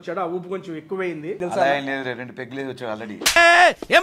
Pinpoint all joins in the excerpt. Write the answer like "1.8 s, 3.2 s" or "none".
1.4 s